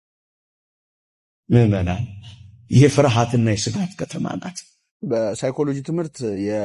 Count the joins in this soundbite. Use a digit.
1